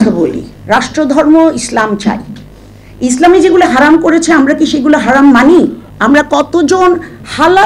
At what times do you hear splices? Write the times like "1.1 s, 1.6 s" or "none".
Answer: 5.9 s